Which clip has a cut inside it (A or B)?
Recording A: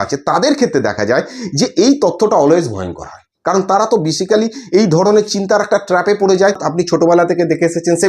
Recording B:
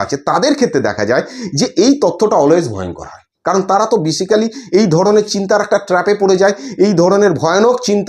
A